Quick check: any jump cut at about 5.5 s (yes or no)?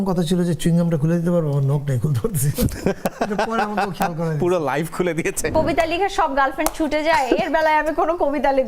yes